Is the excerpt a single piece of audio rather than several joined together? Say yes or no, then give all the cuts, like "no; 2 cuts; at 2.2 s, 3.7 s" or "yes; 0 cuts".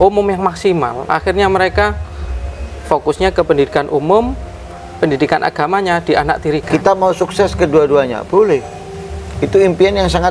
no; 1 cut; at 6.6 s